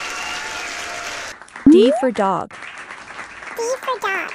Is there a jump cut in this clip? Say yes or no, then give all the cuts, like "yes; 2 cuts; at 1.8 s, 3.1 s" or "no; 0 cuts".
yes; 1 cut; at 1.3 s